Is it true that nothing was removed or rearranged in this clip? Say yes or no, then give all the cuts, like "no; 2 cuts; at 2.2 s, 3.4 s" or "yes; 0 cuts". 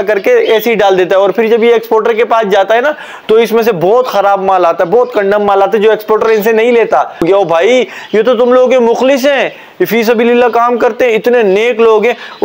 no; 1 cut; at 7.2 s